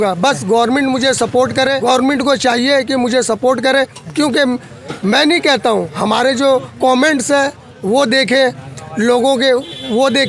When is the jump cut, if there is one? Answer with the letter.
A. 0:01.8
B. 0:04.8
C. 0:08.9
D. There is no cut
A